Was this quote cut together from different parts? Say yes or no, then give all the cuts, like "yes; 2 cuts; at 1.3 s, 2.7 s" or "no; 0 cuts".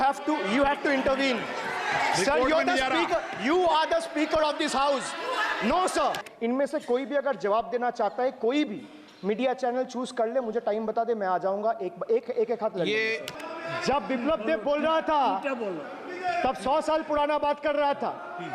yes; 2 cuts; at 6.3 s, 13.3 s